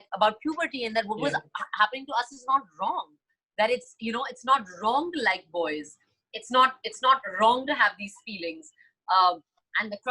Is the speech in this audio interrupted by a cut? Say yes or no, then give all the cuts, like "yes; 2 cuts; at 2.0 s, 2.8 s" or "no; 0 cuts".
no; 0 cuts